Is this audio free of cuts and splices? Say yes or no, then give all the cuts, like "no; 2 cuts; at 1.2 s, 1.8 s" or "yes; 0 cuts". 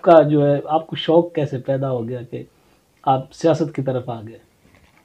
yes; 0 cuts